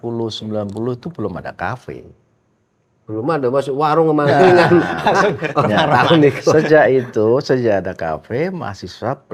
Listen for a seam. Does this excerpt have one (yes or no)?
no